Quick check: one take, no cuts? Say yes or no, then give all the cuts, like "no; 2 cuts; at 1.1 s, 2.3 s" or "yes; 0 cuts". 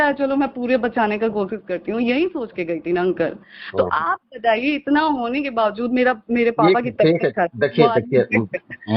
yes; 0 cuts